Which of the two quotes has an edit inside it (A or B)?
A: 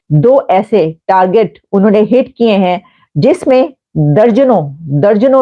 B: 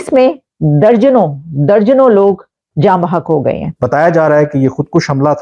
B